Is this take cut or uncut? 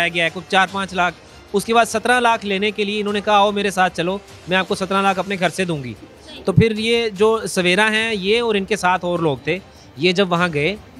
uncut